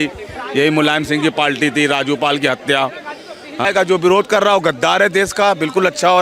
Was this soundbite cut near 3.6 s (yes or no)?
yes